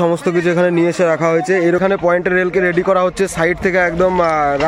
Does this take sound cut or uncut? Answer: cut